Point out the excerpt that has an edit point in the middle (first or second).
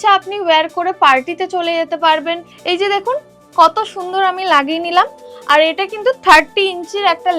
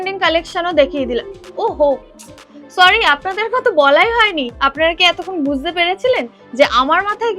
first